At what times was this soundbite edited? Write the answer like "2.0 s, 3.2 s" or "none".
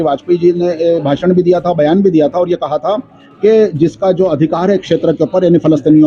none